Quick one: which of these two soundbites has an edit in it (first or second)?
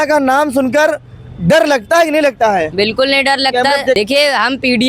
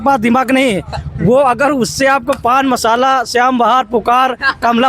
first